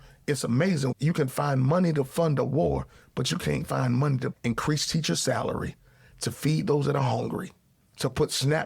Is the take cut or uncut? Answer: cut